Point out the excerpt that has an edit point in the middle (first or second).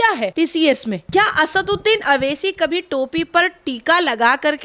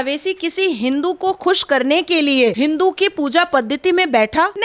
first